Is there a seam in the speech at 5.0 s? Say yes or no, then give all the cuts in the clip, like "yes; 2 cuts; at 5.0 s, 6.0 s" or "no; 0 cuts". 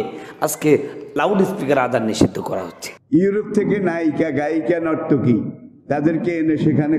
no; 1 cut; at 2.9 s